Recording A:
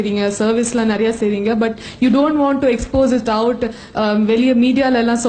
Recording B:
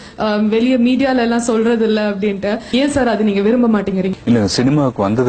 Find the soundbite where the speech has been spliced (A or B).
B